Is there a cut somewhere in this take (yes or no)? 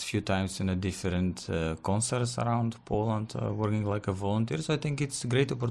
no